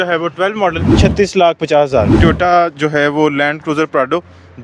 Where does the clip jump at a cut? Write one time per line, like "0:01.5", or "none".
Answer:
0:00.9
0:02.2